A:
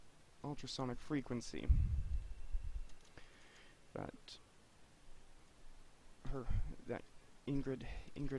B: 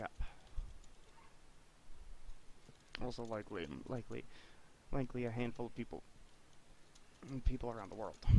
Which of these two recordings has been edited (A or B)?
B